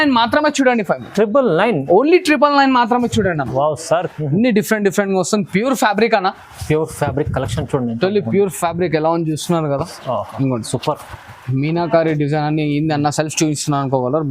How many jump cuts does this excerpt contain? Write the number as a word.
one